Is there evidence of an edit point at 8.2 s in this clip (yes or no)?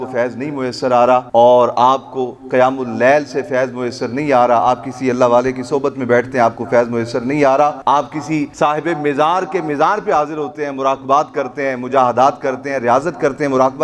yes